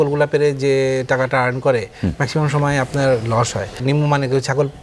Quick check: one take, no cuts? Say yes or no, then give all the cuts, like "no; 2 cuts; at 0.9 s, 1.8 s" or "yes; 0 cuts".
no; 1 cut; at 3.8 s